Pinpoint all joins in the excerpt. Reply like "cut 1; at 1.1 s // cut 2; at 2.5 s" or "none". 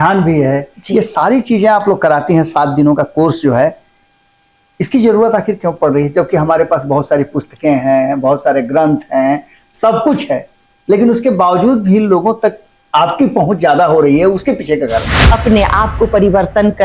cut 1; at 15.2 s